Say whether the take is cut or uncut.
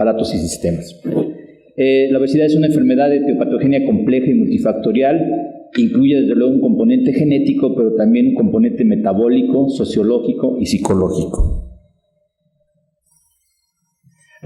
cut